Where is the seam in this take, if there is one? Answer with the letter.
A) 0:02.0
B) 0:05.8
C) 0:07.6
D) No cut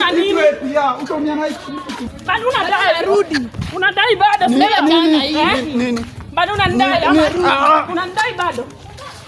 A